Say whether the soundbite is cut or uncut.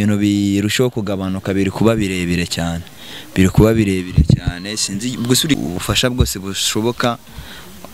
cut